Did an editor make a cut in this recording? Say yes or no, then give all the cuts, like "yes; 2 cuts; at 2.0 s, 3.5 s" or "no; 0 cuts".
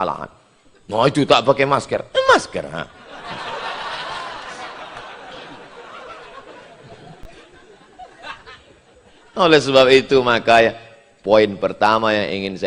no; 0 cuts